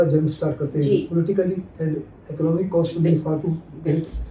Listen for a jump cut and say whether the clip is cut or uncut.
cut